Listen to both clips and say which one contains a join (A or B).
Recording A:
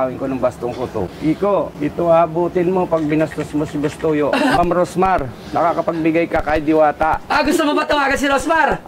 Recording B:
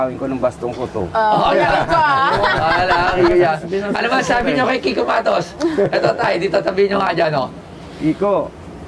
A